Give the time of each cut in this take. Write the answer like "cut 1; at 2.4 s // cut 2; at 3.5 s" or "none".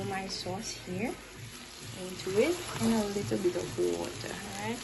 none